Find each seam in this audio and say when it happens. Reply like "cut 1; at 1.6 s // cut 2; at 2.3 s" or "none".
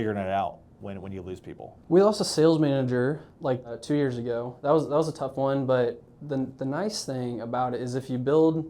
cut 1; at 1.7 s // cut 2; at 3.4 s